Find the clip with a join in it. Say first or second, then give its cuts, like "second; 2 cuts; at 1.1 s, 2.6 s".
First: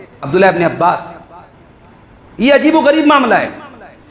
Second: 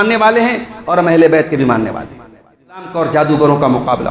second; 1 cut; at 2.9 s